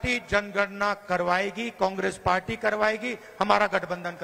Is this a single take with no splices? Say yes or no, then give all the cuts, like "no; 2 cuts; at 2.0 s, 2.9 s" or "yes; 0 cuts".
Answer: yes; 0 cuts